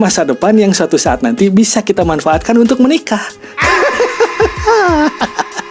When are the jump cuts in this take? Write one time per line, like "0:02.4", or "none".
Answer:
none